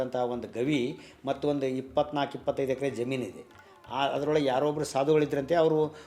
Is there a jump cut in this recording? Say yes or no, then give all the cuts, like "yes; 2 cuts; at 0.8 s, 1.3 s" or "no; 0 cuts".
no; 0 cuts